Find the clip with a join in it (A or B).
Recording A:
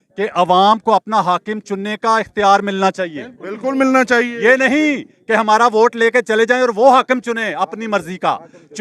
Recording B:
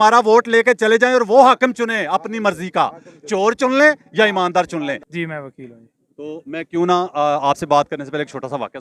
B